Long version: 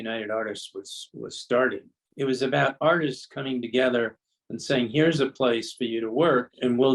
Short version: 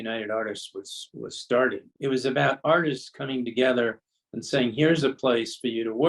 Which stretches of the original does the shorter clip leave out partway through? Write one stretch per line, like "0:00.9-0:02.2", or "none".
0:01.9-0:02.0